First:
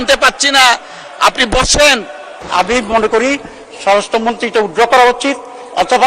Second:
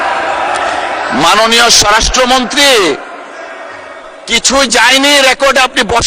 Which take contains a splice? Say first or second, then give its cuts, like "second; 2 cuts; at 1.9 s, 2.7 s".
first; 1 cut; at 2.3 s